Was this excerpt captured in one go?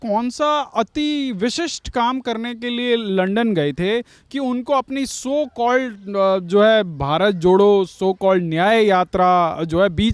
yes; 0 cuts

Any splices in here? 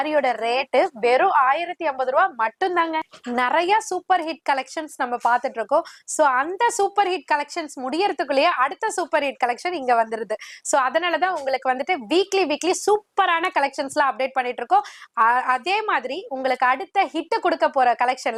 no; 0 cuts

